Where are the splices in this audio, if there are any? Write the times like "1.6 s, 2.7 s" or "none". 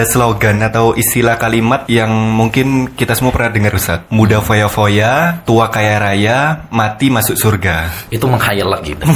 1.8 s, 4.0 s, 5.4 s, 8.1 s